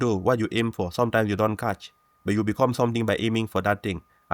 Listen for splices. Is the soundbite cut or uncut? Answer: uncut